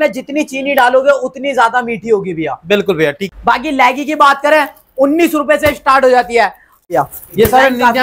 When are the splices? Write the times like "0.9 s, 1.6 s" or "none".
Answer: 3.2 s, 6.8 s

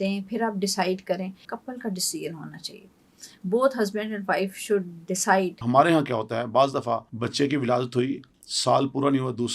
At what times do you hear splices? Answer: 1.5 s, 5.6 s, 7.1 s

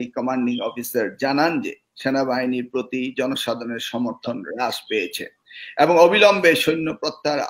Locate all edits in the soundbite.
none

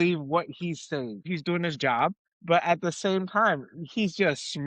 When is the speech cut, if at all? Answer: 1.2 s

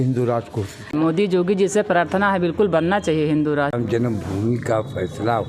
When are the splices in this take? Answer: 0.9 s, 3.7 s

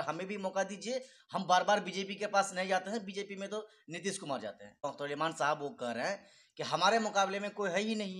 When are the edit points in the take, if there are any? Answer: 4.8 s

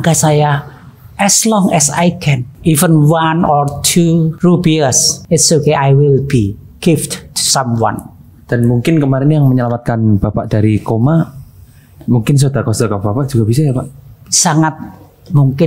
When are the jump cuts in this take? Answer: 2.5 s, 4.3 s, 5.1 s

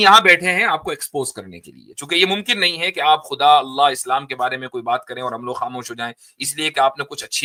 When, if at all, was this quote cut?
none

